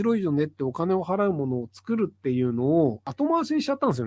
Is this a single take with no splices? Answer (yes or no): no